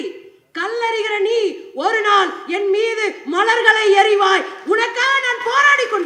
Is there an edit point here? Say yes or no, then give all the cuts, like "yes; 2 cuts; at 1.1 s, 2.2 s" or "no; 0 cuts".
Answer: no; 0 cuts